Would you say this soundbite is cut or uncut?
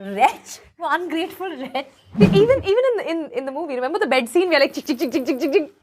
cut